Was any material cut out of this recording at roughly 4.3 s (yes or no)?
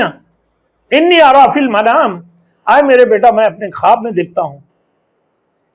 no